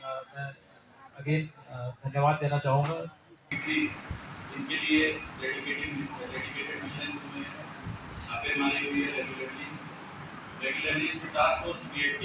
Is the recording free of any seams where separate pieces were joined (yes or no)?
no